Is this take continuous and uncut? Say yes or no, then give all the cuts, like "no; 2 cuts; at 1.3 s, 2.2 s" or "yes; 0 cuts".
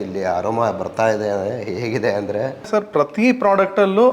no; 1 cut; at 2.6 s